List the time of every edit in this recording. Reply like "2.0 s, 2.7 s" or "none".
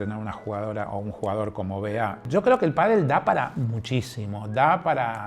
2.2 s